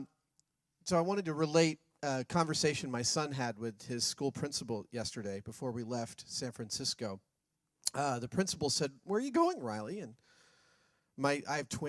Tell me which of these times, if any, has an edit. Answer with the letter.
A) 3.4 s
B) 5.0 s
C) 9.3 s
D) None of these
B